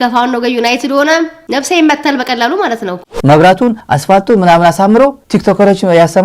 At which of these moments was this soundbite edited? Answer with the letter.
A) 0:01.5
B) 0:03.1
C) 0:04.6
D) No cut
B